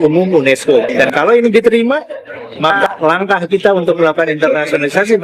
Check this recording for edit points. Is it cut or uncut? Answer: cut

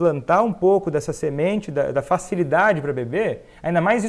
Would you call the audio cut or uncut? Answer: uncut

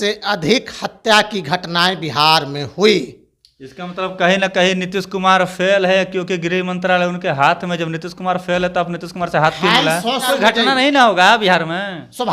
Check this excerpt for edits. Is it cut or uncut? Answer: cut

